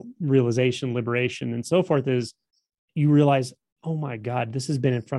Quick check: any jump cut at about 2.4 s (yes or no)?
no